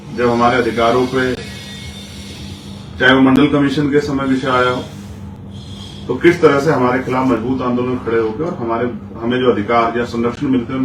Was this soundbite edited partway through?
no; 0 cuts

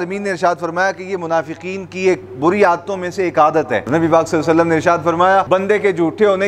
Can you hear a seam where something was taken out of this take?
yes; 2 cuts; at 3.9 s, 5.5 s

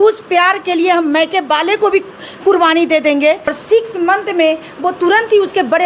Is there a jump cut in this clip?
yes; 1 cut; at 3.5 s

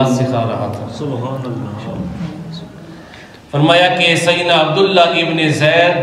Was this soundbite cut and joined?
no; 0 cuts

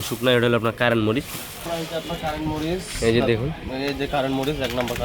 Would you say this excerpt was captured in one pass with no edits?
no; 1 cut; at 1.5 s

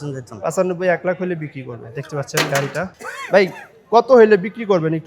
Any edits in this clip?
yes; 1 cut; at 2.9 s

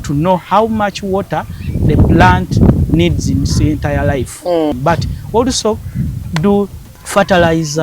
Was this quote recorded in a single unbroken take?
no; 2 cuts; at 4.7 s, 6.8 s

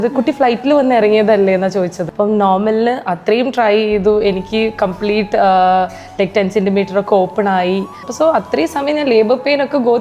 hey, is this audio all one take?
no; 2 cuts; at 2.0 s, 8.1 s

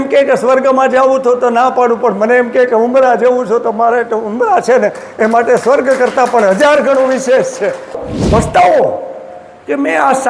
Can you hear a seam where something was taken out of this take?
yes; 1 cut; at 8.0 s

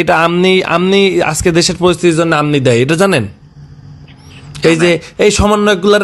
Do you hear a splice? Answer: no; 0 cuts

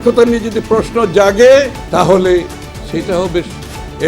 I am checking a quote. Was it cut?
yes; 1 cut; at 1.8 s

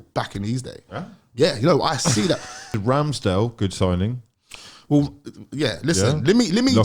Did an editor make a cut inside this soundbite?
yes; 1 cut; at 2.8 s

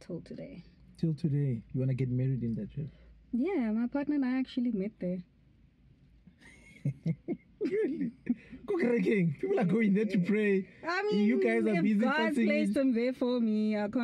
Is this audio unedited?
yes; 0 cuts

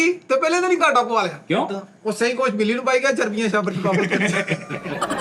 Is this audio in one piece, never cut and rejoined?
yes; 0 cuts

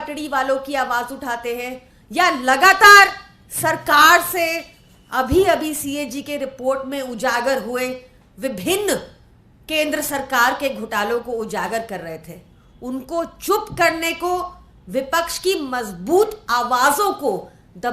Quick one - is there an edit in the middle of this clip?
no; 0 cuts

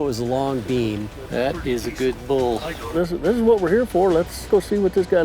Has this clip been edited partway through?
yes; 3 cuts; at 1.1 s, 2.9 s, 4.5 s

